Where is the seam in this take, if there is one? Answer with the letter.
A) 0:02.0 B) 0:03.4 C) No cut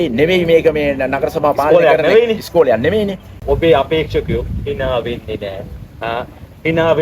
B